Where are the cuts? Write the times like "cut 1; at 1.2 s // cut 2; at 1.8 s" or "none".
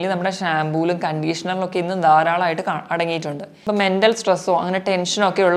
cut 1; at 3.5 s

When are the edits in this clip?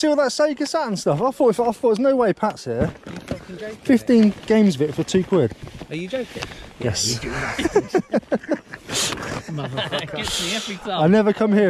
none

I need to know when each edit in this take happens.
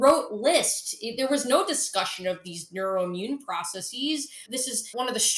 cut 1; at 4.4 s

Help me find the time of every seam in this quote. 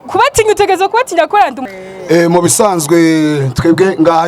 cut 1; at 1.6 s

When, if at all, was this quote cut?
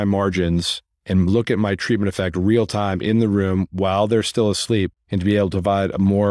cut 1; at 5.0 s

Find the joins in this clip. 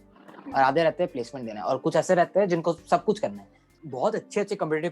cut 1; at 3.8 s

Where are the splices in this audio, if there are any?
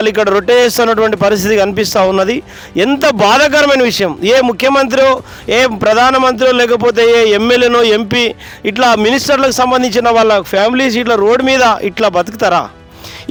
none

